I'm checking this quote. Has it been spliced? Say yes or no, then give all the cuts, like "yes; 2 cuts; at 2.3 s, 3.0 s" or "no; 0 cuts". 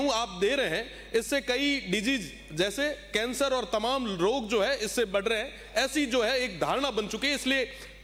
no; 0 cuts